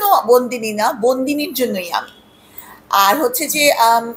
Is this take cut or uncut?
uncut